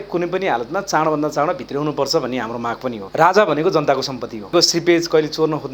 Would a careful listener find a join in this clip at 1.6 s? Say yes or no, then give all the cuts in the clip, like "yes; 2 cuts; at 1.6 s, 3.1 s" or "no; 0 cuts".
no; 2 cuts; at 3.0 s, 4.5 s